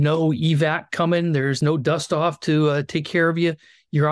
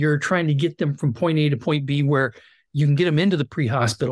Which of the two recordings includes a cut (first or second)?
first